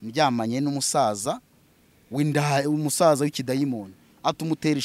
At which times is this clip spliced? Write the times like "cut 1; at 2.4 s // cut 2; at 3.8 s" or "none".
none

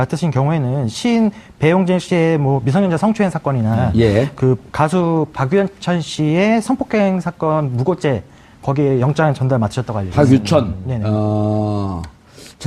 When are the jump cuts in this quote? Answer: none

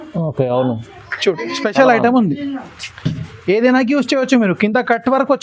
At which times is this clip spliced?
none

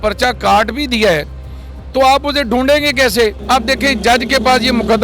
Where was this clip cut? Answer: cut 1; at 3.4 s

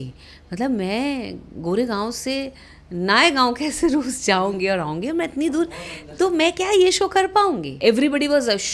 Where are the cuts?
cut 1; at 7.7 s

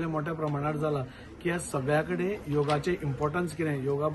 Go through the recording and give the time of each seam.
none

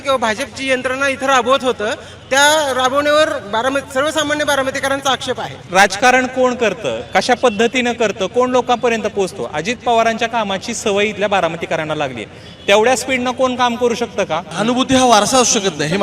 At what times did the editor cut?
cut 1; at 5.7 s // cut 2; at 14.5 s

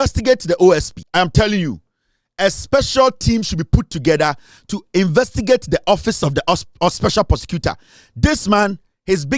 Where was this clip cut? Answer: cut 1; at 1.0 s

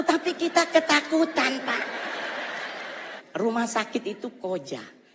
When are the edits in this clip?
cut 1; at 3.2 s

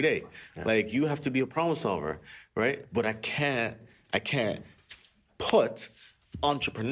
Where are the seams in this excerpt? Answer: none

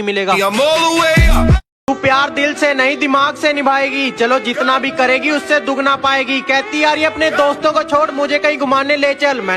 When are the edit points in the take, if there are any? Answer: cut 1; at 1.6 s

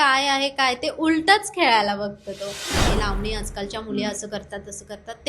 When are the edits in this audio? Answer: cut 1; at 2.9 s

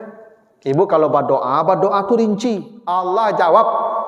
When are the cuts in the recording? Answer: cut 1; at 3.0 s

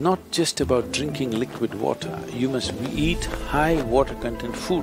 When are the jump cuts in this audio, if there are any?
none

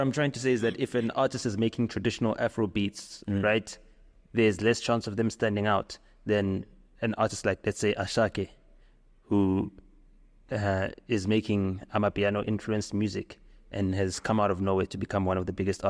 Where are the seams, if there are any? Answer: none

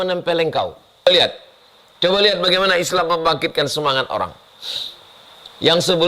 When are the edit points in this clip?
cut 1; at 1.0 s

